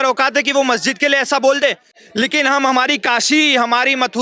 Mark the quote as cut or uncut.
cut